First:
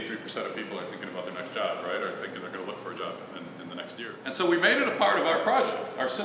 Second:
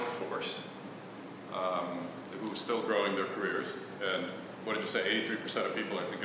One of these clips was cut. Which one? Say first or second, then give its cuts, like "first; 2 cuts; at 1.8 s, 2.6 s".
first; 1 cut; at 4.1 s